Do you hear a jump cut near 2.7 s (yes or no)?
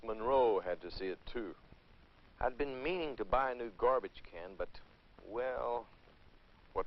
yes